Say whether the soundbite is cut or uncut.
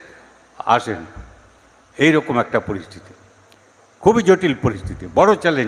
uncut